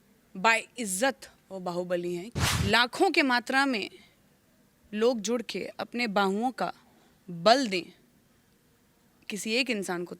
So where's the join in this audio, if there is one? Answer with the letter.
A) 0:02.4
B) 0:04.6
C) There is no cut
A